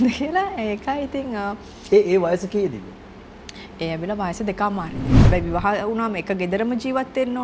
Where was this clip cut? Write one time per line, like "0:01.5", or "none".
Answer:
0:05.1